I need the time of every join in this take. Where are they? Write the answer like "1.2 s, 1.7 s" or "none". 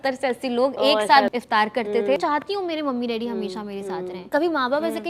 1.3 s, 2.2 s, 4.3 s